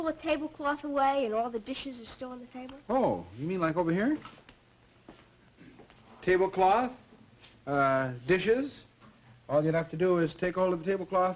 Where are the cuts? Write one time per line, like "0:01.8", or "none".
0:01.1